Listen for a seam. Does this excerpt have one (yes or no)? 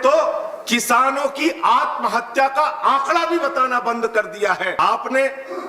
yes